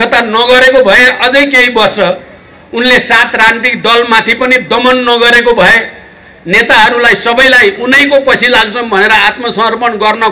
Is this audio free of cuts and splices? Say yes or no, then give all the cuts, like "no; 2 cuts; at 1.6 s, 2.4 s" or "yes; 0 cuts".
yes; 0 cuts